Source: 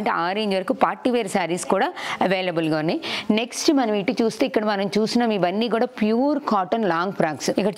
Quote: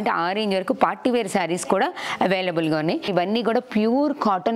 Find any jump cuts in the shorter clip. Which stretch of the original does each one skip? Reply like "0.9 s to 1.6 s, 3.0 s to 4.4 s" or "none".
3.1 s to 5.4 s